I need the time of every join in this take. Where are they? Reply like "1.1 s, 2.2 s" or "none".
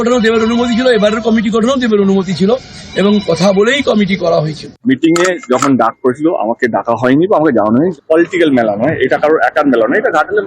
4.8 s, 8.0 s